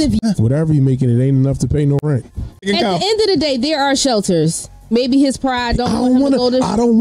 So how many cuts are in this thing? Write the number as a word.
zero